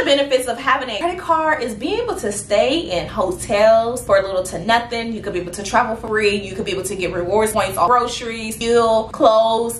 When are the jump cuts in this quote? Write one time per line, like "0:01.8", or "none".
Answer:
0:00.9
0:06.0
0:07.6